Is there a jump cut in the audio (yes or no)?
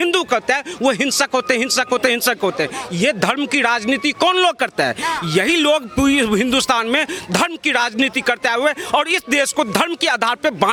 no